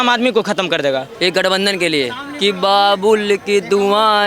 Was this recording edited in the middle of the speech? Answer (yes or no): yes